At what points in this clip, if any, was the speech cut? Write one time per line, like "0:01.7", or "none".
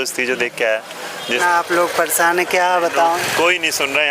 0:01.4
0:03.2

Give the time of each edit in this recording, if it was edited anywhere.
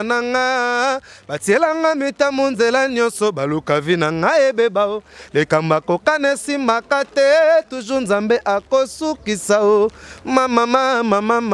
none

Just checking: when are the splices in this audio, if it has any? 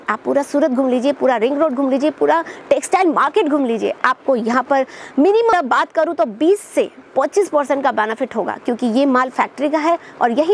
0:05.5

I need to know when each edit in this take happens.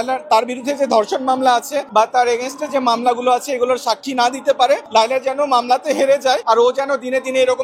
0:01.8
0:04.8
0:06.4

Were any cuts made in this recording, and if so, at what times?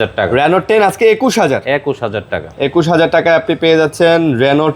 none

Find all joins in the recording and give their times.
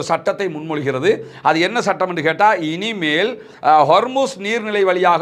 none

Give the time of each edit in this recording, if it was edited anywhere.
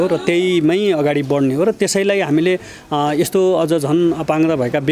none

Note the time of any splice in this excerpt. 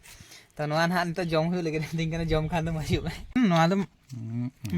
0:03.4

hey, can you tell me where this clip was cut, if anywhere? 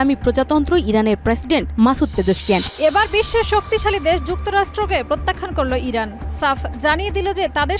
0:02.7

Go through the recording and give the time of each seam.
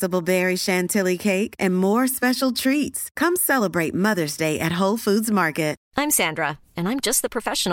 0:05.8

